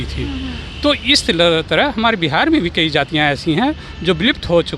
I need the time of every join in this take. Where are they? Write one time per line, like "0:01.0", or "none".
none